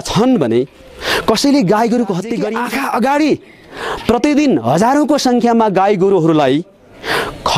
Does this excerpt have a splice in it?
yes; 1 cut; at 2.5 s

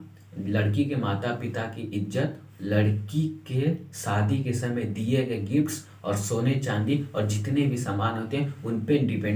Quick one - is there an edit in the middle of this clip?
no; 0 cuts

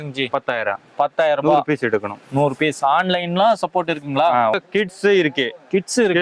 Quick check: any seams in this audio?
yes; 1 cut; at 4.5 s

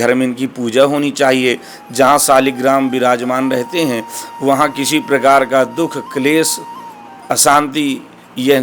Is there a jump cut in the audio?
no; 0 cuts

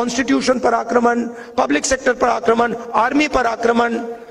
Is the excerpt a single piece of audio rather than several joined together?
yes; 0 cuts

